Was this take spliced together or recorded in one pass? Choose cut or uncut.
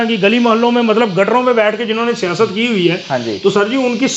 uncut